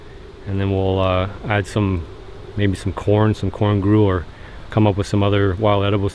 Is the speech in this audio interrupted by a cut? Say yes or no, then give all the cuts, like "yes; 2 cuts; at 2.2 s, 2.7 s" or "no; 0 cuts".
yes; 1 cut; at 4.3 s